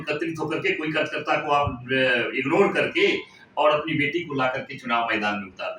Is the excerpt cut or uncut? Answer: uncut